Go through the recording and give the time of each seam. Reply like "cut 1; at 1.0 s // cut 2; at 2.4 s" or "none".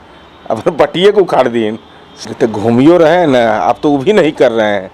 cut 1; at 2.0 s